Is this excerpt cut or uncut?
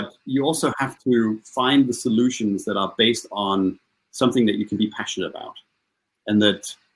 uncut